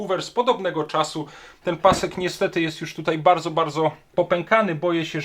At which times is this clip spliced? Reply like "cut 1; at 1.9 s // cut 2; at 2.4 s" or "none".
cut 1; at 1.4 s // cut 2; at 4.1 s